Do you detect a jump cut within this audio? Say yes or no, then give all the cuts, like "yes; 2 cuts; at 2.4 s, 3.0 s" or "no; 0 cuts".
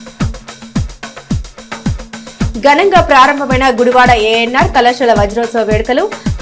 yes; 1 cut; at 0.9 s